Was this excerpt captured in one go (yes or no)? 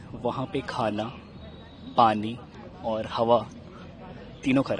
yes